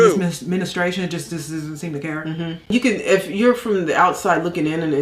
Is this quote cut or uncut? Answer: cut